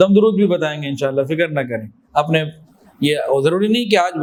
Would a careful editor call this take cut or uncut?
uncut